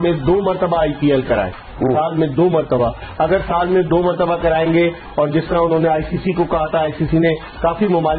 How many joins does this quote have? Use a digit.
0